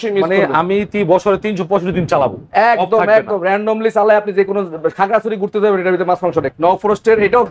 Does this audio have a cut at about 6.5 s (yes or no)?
yes